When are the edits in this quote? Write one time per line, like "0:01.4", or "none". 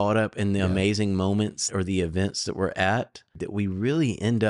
0:01.7
0:03.4